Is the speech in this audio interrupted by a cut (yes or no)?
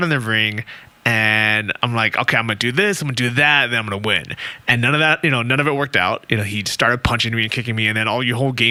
no